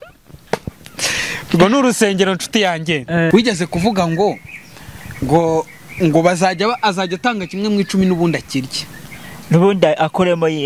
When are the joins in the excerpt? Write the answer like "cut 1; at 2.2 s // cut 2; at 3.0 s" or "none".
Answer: cut 1; at 3.3 s